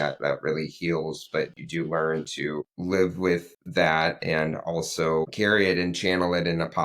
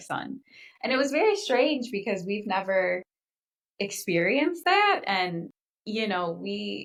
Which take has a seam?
first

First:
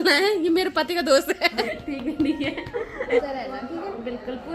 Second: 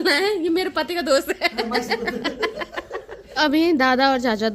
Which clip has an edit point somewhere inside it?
first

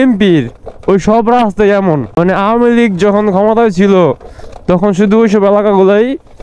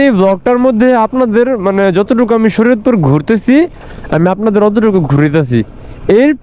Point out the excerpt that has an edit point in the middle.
first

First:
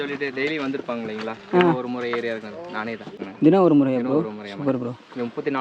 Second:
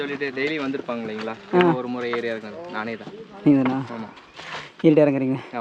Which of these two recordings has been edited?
first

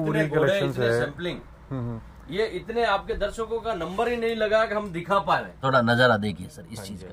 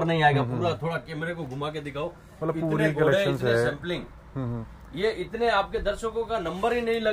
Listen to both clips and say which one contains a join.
first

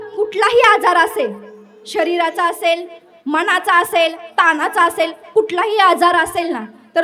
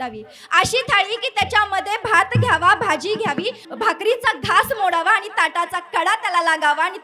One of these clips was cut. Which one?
second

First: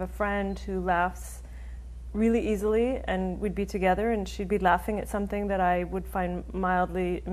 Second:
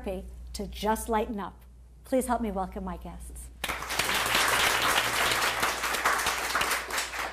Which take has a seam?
second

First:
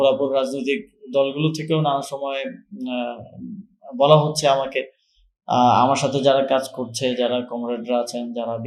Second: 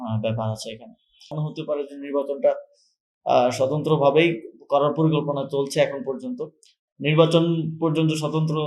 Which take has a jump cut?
second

